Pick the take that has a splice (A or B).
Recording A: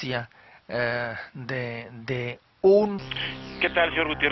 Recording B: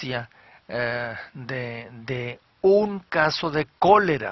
B